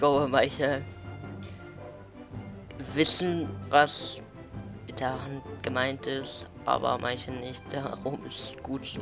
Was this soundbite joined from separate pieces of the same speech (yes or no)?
no